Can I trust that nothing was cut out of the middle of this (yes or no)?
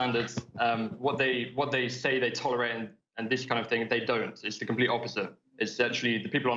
yes